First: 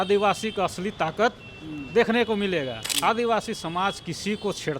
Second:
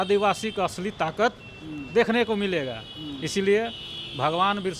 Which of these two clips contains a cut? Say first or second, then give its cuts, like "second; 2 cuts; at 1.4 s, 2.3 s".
first; 1 cut; at 2.8 s